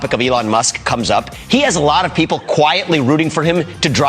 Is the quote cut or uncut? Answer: cut